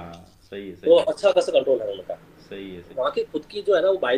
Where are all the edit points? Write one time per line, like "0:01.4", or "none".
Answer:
0:02.9